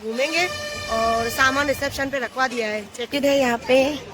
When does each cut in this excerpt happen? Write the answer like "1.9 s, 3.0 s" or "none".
3.1 s